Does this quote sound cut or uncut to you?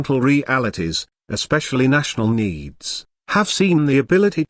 uncut